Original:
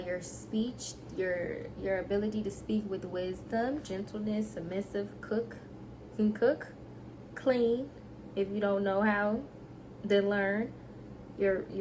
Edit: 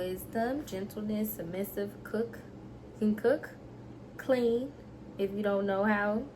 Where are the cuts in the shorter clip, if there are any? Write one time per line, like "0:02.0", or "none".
none